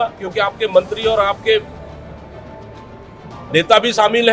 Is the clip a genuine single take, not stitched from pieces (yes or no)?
yes